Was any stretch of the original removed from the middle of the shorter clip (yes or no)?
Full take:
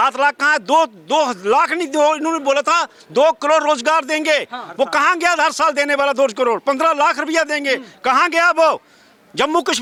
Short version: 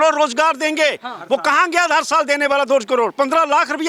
no